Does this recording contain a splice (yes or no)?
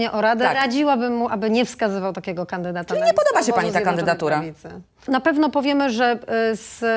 yes